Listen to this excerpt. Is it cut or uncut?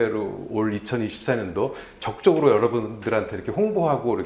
uncut